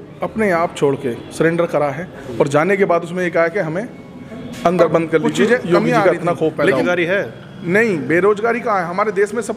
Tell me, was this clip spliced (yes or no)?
yes